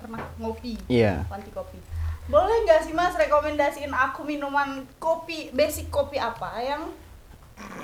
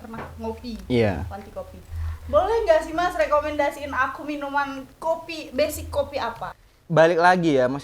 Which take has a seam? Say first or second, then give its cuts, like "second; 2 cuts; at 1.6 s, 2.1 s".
second; 1 cut; at 6.5 s